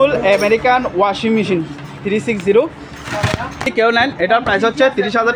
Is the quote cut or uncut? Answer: cut